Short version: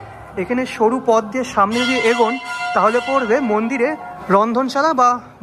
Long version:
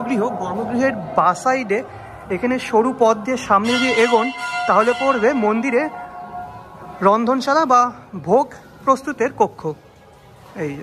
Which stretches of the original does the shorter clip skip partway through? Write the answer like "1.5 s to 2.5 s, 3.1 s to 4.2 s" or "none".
6.0 s to 6.8 s